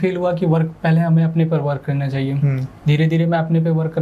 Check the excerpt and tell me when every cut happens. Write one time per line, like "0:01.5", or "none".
none